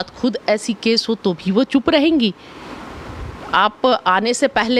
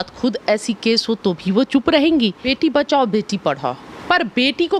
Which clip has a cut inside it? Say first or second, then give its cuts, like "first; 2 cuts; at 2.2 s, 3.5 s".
second; 1 cut; at 2.4 s